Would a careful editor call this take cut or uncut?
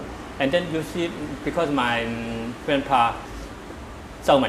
cut